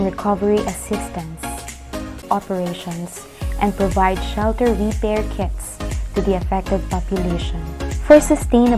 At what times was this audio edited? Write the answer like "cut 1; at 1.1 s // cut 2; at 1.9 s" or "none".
cut 1; at 2.2 s